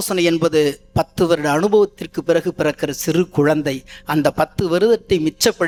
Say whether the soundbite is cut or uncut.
uncut